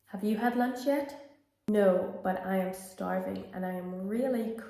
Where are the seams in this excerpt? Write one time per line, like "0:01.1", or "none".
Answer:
0:01.7